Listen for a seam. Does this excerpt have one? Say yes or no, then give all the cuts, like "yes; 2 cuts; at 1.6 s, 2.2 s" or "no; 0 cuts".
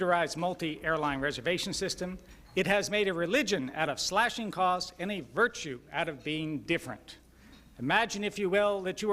no; 0 cuts